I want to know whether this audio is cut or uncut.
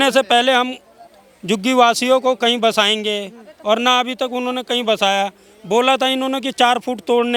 uncut